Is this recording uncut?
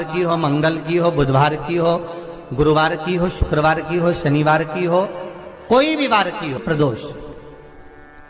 no; 1 cut; at 6.6 s

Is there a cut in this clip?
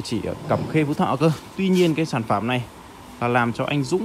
no; 0 cuts

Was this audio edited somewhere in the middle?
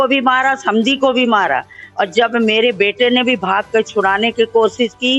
no; 0 cuts

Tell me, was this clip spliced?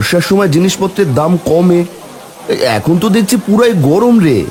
no; 0 cuts

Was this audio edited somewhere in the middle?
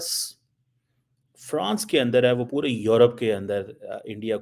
no; 0 cuts

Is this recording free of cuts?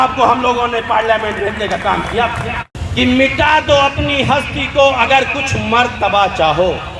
no; 1 cut; at 2.7 s

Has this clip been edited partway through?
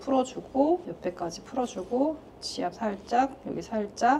yes; 1 cut; at 0.9 s

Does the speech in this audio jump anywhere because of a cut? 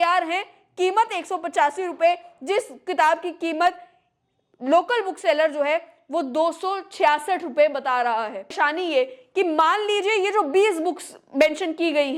yes; 1 cut; at 8.5 s

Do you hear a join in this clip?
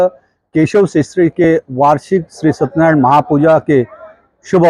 no; 0 cuts

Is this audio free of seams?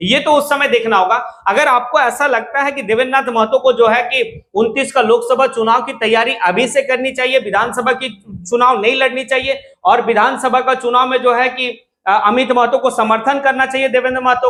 yes; 0 cuts

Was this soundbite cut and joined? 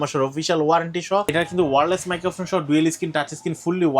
yes; 1 cut; at 1.3 s

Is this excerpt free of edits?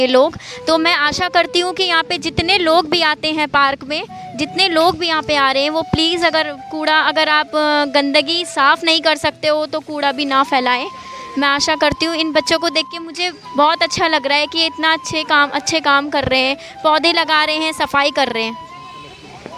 yes; 0 cuts

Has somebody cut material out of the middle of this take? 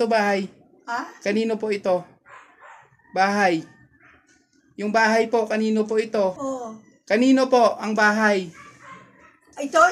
yes; 1 cut; at 6.4 s

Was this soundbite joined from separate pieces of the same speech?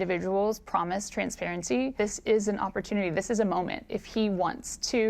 yes; 1 cut; at 1.9 s

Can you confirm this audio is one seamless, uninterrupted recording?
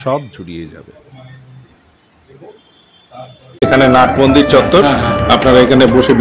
no; 1 cut; at 3.6 s

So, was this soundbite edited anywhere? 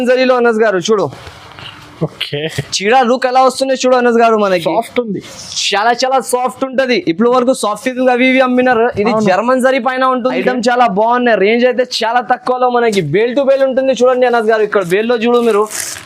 yes; 1 cut; at 10.3 s

